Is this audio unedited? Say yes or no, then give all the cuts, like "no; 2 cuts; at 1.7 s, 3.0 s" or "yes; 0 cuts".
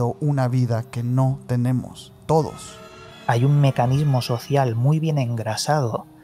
no; 1 cut; at 3.1 s